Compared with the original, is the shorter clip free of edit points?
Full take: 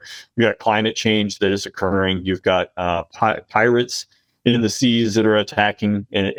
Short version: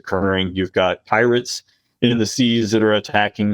no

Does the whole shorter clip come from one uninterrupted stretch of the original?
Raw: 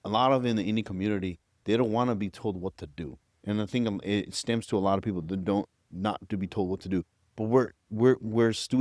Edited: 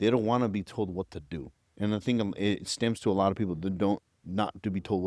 yes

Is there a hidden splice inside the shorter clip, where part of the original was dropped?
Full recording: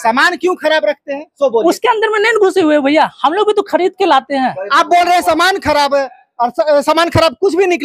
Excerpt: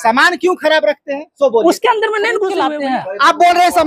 yes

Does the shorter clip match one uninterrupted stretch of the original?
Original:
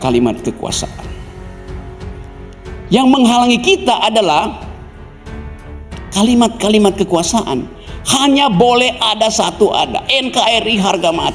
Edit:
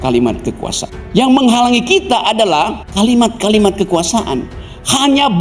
no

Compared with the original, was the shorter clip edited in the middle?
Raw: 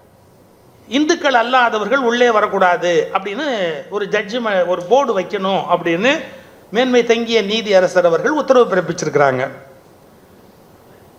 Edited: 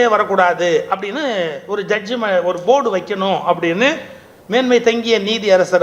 no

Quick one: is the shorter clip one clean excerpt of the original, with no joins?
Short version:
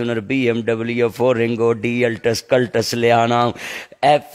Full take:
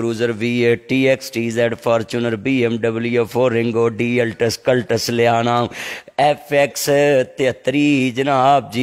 yes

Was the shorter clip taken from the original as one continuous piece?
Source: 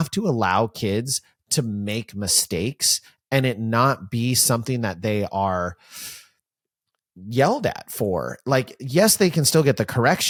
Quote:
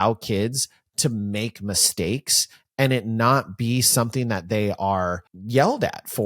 no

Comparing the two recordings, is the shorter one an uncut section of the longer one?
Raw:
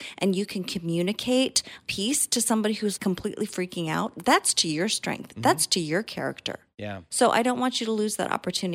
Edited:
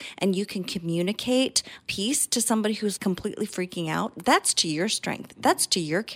yes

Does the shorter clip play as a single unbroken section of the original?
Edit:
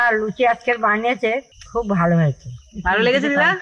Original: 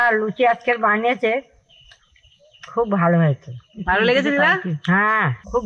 no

